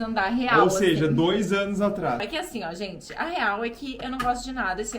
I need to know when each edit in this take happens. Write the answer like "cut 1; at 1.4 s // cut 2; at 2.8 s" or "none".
cut 1; at 2.3 s

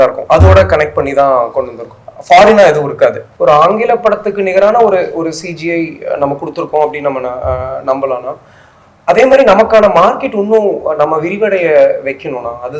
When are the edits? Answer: cut 1; at 3.3 s

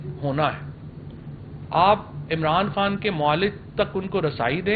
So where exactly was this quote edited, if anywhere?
none

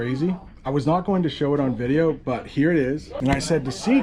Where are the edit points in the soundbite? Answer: cut 1; at 3.1 s

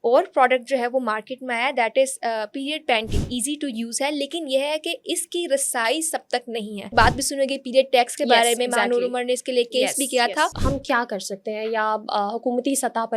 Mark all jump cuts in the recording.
cut 1; at 3.3 s // cut 2; at 6.9 s // cut 3; at 10.6 s

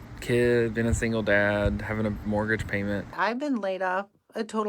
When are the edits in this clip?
cut 1; at 3.1 s

